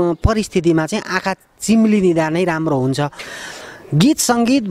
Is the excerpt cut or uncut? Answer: cut